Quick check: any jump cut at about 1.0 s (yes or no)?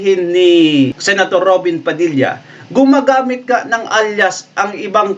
yes